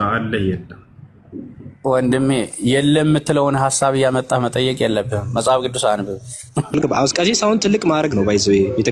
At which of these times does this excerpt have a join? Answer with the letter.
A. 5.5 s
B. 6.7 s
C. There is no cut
B